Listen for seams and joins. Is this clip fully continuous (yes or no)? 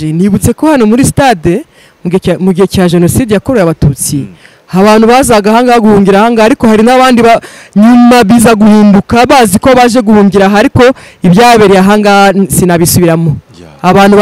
yes